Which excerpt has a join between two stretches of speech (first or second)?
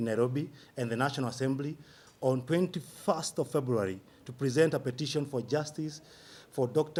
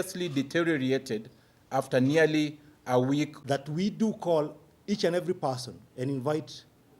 second